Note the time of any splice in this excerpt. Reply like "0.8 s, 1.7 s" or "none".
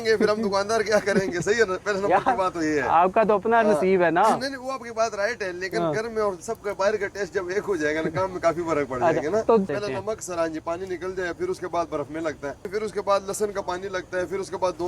9.7 s, 12.7 s

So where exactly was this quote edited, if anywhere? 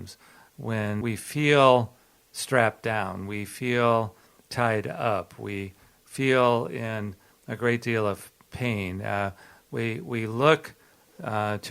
1.0 s

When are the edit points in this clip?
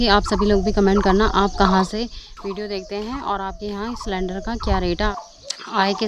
5.1 s

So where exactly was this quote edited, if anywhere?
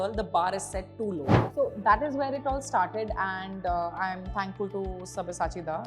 1.4 s

